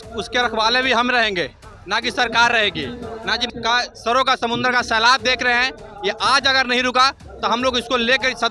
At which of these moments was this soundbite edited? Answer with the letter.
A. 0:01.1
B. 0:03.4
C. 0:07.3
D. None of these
B